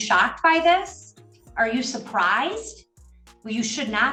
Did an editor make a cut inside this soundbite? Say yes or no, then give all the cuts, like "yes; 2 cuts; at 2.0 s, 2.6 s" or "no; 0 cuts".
no; 0 cuts